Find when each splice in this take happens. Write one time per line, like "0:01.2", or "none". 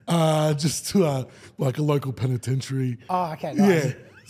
none